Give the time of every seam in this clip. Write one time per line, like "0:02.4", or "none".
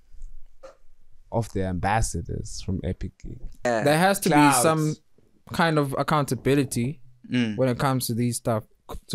0:03.6